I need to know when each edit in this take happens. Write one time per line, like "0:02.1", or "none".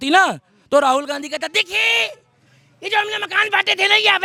none